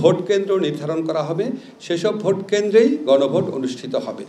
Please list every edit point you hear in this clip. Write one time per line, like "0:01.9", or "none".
none